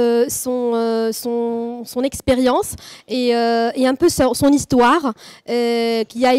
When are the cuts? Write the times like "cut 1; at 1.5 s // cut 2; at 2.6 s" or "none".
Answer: none